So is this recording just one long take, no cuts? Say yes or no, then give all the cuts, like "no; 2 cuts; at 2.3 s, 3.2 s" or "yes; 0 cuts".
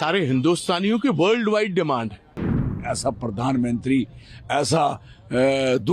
no; 1 cut; at 2.8 s